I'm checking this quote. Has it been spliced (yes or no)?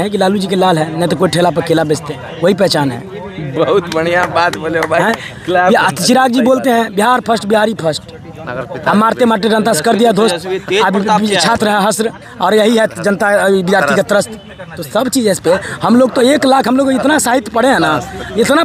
no